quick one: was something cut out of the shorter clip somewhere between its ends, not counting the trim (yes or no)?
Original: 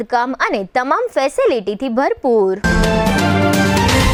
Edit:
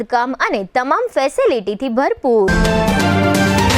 yes